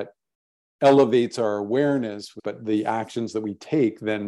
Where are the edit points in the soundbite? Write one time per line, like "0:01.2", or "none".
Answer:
0:02.4